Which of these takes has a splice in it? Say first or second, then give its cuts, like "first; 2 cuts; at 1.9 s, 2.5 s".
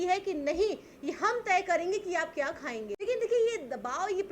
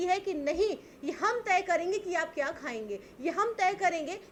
first; 1 cut; at 2.9 s